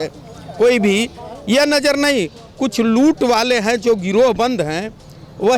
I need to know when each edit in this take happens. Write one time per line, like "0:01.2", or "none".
none

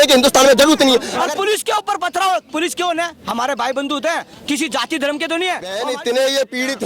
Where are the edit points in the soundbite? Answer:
0:01.1
0:05.8

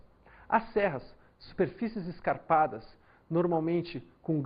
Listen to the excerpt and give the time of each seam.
0:01.5

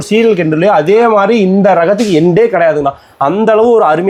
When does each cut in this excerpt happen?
none

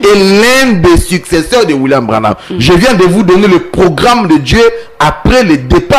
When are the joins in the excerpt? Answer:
none

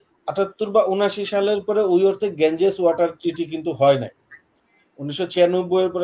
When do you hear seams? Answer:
none

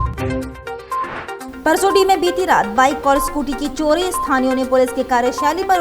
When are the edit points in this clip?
0:01.4

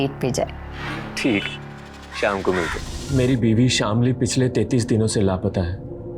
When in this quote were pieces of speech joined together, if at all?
0:02.9

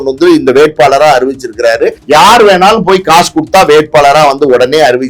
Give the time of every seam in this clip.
0:02.0

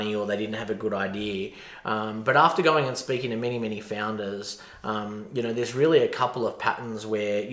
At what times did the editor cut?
none

